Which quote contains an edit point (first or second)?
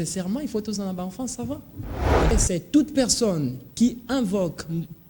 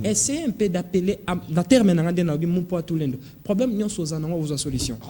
first